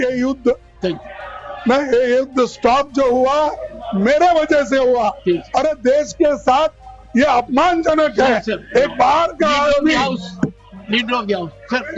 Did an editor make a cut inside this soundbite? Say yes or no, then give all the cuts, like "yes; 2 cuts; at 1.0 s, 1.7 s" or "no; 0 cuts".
no; 0 cuts